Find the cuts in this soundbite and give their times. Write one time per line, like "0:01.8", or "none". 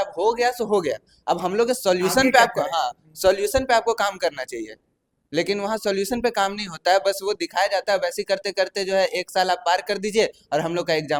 none